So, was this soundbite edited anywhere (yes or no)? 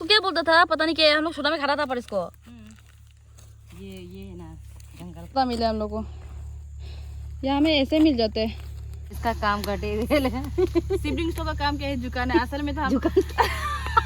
yes